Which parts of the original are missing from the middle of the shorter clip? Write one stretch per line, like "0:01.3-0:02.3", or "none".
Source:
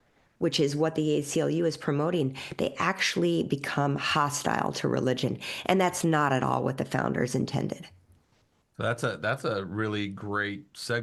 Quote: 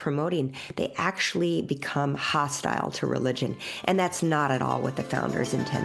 none